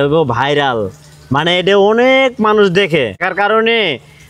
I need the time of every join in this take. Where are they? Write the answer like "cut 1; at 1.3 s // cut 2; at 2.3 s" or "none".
cut 1; at 3.2 s